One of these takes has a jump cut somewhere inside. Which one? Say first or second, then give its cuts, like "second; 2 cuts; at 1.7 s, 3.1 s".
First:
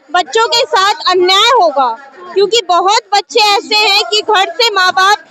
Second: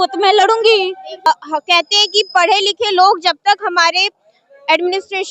second; 1 cut; at 1.3 s